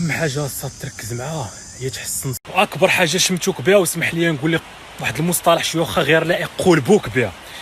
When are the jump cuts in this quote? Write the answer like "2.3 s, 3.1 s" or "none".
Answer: 2.4 s